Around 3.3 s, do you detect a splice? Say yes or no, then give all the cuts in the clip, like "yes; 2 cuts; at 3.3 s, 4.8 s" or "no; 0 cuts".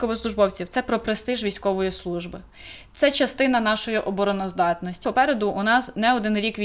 no; 1 cut; at 5.0 s